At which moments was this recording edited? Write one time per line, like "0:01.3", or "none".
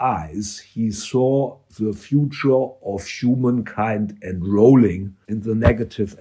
0:01.6
0:05.1